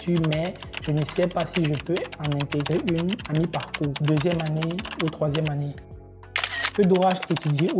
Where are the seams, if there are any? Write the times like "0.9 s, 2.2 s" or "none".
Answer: 4.0 s, 6.3 s

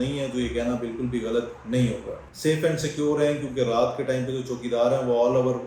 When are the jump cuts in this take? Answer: 2.0 s

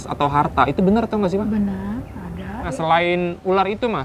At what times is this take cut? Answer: 2.7 s

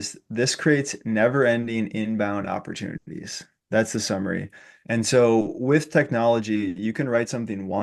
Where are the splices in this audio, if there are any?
none

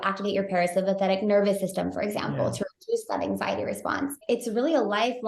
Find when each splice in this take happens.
4.2 s

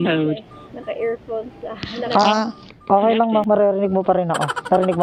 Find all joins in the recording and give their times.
none

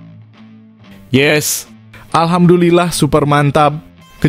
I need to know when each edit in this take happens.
1.1 s

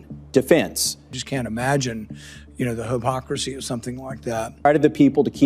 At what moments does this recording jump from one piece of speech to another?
1.0 s, 4.7 s

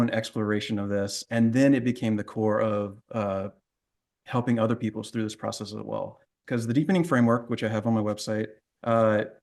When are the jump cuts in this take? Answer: 6.4 s

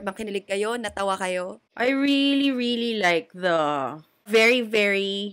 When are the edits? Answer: 1.6 s, 4.3 s

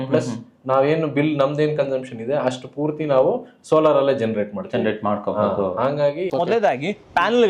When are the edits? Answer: 6.2 s

